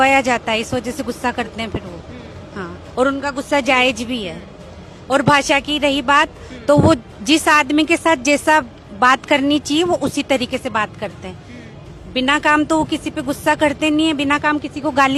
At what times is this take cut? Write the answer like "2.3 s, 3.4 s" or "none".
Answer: none